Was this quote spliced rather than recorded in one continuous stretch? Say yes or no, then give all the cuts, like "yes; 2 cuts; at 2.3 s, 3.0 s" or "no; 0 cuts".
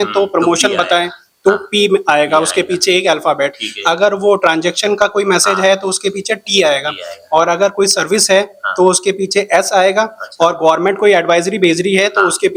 no; 0 cuts